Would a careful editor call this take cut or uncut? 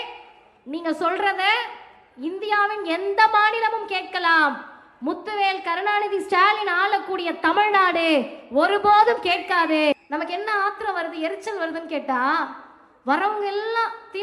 cut